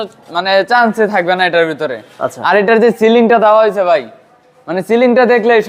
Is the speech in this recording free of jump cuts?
yes; 0 cuts

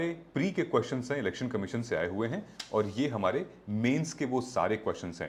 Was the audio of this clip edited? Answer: no; 0 cuts

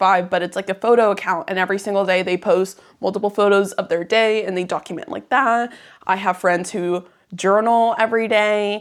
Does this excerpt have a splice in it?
no; 0 cuts

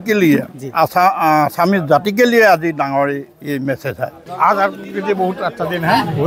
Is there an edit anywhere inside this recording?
yes; 1 cut; at 4.2 s

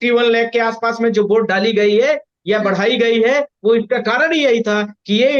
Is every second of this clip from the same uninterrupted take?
yes; 0 cuts

